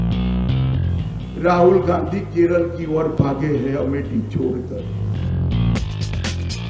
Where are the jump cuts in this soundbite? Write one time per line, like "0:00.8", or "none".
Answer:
0:05.8